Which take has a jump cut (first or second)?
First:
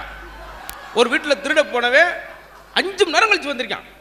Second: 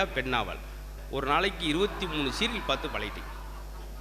second